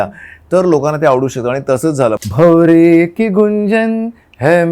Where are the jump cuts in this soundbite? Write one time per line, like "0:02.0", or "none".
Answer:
0:02.2